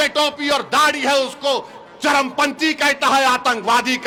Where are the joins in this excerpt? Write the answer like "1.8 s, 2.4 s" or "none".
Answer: none